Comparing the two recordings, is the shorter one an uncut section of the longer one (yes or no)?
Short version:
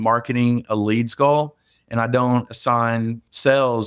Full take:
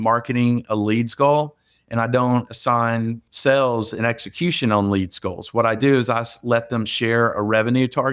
yes